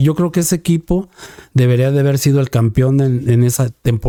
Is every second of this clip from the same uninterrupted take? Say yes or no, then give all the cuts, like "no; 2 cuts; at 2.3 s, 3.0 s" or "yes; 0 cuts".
yes; 0 cuts